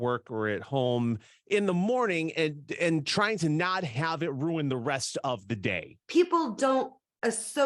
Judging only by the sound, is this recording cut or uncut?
cut